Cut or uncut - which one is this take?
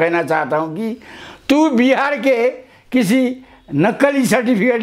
uncut